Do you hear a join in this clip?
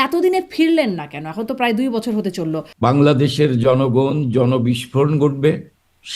yes; 1 cut; at 2.6 s

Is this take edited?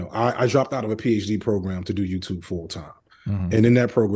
no; 0 cuts

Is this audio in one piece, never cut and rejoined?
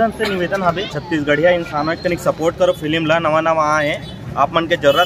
no; 1 cut; at 0.9 s

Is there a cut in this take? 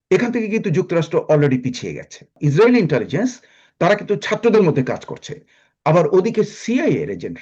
yes; 1 cut; at 2.4 s

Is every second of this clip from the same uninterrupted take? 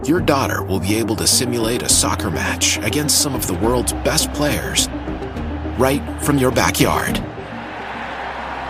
yes; 0 cuts

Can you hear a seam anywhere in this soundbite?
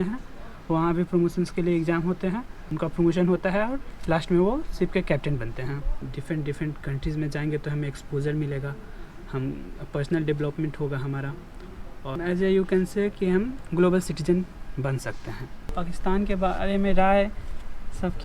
yes; 4 cuts; at 2.6 s, 6.1 s, 12.1 s, 15.7 s

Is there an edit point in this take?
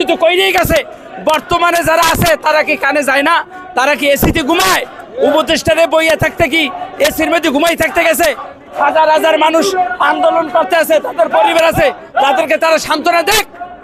no; 0 cuts

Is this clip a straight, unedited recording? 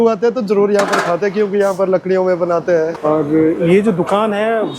no; 1 cut; at 3.0 s

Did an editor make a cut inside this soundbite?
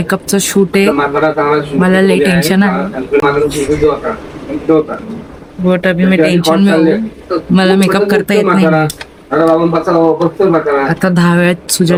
no; 0 cuts

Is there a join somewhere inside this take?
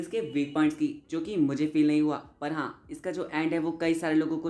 no; 0 cuts

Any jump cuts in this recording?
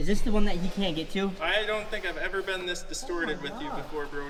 no; 0 cuts

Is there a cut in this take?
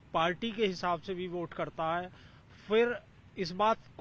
no; 0 cuts

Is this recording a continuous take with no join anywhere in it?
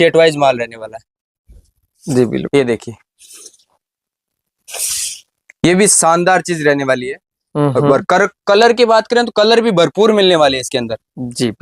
no; 1 cut; at 1.9 s

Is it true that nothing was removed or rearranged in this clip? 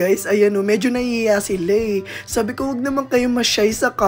yes; 0 cuts

